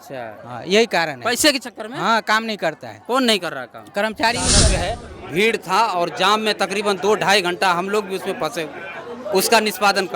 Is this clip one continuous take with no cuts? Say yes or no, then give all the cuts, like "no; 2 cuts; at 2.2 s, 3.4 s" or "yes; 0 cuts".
no; 1 cut; at 4.7 s